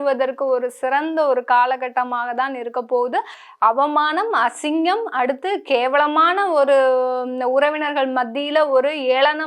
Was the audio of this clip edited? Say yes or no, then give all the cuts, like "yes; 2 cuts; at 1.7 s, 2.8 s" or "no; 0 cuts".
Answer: yes; 1 cut; at 3.4 s